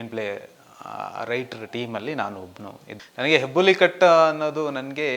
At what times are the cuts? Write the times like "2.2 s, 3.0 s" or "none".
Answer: 2.9 s